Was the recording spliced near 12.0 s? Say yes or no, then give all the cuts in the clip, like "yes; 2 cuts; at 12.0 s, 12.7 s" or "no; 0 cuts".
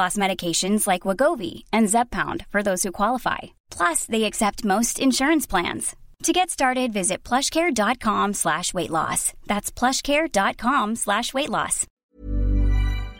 yes; 1 cut; at 12.0 s